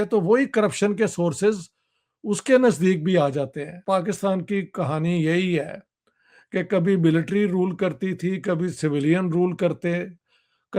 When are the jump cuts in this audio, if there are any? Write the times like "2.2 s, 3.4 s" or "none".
3.7 s